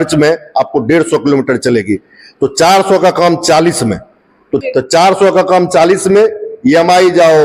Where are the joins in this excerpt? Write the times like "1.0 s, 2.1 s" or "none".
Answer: 4.6 s